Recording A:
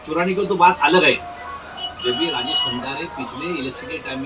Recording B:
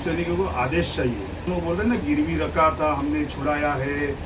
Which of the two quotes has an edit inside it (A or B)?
B